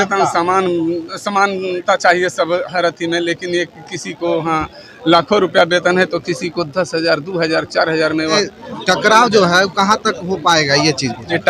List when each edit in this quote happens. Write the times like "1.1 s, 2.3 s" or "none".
8.4 s